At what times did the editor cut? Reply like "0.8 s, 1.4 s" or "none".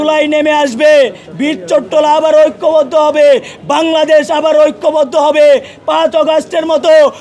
1.2 s